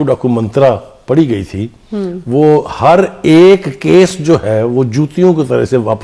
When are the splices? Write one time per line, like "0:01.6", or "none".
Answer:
none

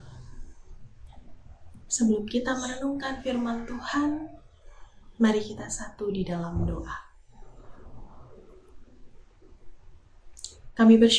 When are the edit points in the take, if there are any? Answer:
0:01.0

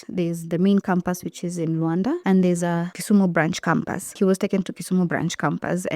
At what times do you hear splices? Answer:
0:02.2
0:02.9
0:04.1

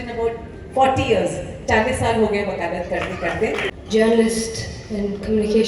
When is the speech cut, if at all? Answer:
0:03.7

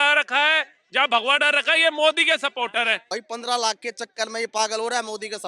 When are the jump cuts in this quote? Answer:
0:03.1

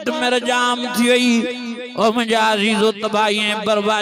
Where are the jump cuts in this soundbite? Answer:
none

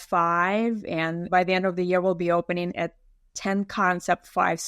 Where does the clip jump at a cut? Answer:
0:01.2

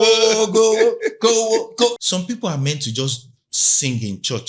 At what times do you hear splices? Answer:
0:02.0

